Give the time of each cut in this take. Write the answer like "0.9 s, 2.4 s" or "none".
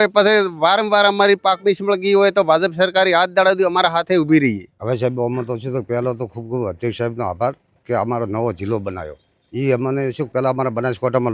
4.7 s

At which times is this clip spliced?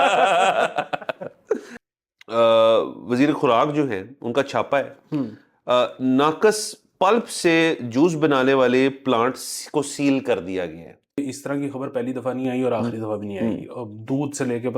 1.7 s, 11.2 s

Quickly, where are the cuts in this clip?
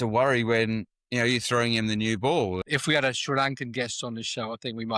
2.6 s

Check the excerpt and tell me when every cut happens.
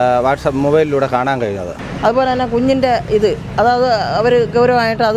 1.8 s

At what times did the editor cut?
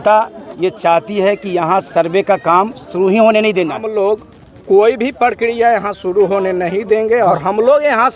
3.8 s

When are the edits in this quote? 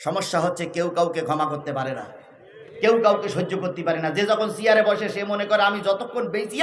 none

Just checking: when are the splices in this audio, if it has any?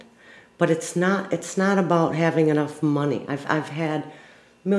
none

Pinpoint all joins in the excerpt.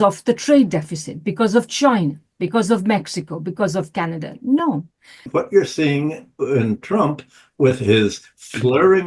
5.3 s

